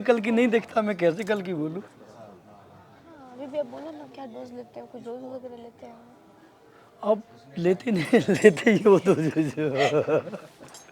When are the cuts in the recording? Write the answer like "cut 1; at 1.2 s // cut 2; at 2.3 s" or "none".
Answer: cut 1; at 3.1 s